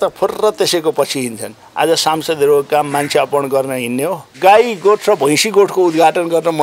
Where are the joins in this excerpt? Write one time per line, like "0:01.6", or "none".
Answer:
0:04.3